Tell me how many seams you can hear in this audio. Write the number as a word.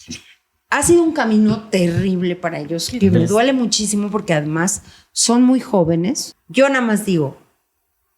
one